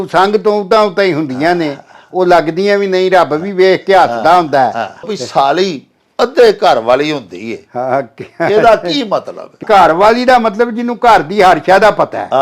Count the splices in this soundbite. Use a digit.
2